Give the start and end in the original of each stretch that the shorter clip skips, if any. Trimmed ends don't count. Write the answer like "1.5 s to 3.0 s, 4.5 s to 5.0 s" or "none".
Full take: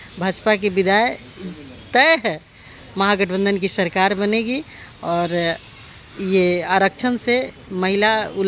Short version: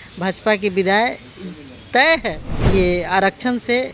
2.5 s to 6.1 s